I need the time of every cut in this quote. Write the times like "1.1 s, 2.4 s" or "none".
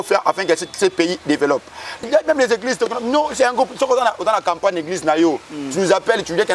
2.0 s